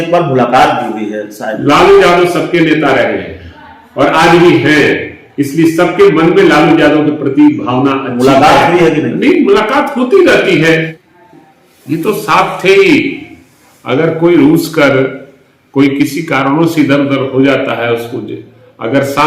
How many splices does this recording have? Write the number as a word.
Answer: one